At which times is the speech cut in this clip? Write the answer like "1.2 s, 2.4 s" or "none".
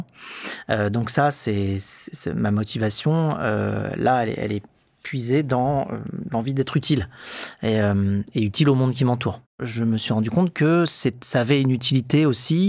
9.7 s